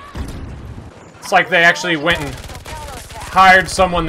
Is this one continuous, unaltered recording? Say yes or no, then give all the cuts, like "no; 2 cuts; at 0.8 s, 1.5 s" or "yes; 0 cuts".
no; 1 cut; at 0.9 s